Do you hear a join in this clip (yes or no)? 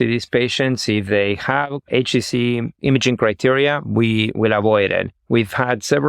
yes